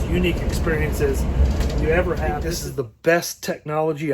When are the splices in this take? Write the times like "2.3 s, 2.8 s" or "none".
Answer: 2.5 s